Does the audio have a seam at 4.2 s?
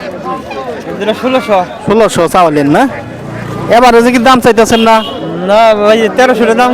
no; 0 cuts

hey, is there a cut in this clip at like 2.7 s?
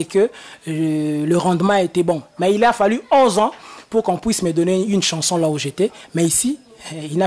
no; 0 cuts

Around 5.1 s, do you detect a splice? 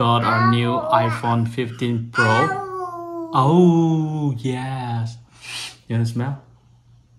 no; 0 cuts

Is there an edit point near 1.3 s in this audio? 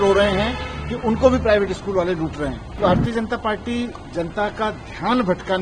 no; 1 cut; at 2.8 s

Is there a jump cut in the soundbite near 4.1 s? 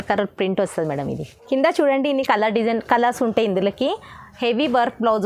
no; 1 cut; at 1.3 s

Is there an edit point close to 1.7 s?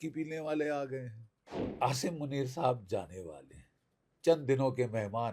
yes; 1 cut; at 1.7 s

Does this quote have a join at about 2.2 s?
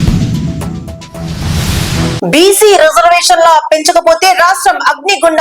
yes; 1 cut; at 2.2 s

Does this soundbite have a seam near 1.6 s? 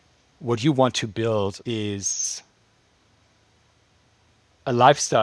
yes; 1 cut; at 1.6 s

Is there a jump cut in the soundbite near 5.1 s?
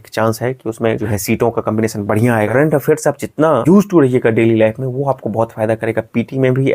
no; 3 cuts; at 1.1 s, 2.5 s, 3.6 s

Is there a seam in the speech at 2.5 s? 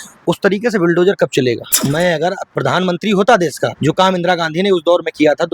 yes; 3 cuts; at 1.7 s, 2.5 s, 3.7 s

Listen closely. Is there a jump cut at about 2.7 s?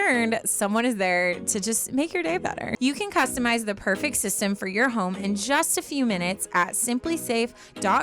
yes; 1 cut; at 2.7 s

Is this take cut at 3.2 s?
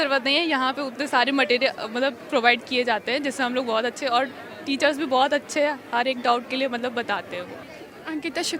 no; 0 cuts

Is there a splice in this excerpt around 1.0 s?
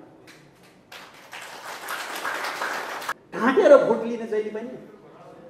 no; 1 cut; at 3.1 s

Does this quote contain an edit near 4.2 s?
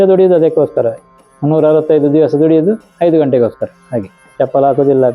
yes; 1 cut; at 4.2 s

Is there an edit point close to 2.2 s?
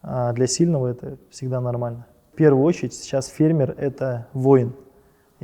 yes; 1 cut; at 2.2 s

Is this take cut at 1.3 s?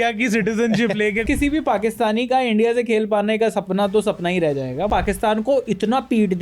yes; 2 cuts; at 1.3 s, 4.9 s

